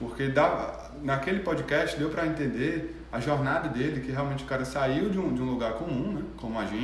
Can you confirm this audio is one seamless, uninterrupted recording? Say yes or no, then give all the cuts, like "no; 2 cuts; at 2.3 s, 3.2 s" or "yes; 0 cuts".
yes; 0 cuts